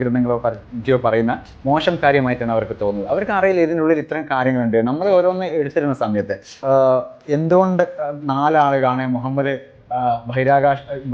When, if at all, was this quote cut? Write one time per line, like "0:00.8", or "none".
0:06.6